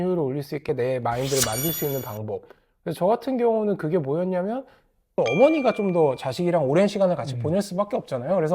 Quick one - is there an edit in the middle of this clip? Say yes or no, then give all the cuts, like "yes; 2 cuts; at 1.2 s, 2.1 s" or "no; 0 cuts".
yes; 1 cut; at 5.1 s